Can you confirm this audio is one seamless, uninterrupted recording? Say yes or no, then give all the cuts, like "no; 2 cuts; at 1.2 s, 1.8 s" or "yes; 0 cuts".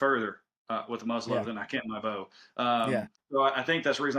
no; 1 cut; at 2.9 s